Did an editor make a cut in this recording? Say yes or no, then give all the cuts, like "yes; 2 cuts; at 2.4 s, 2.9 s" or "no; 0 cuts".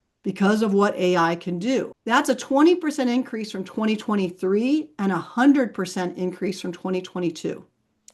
yes; 1 cut; at 1.9 s